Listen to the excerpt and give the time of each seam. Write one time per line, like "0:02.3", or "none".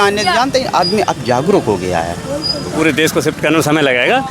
0:02.7